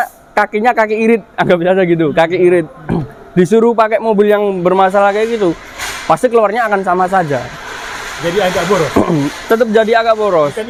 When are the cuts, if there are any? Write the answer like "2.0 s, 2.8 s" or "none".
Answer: none